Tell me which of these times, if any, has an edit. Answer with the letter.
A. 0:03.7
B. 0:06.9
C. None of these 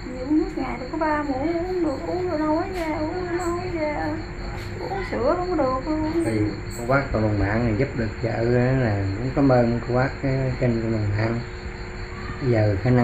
B